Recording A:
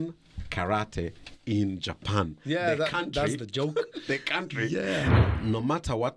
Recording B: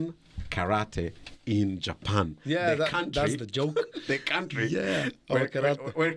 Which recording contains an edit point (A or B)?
A